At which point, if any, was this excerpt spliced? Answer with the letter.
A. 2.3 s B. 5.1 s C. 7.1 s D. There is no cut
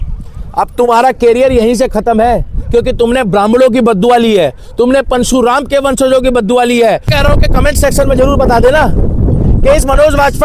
C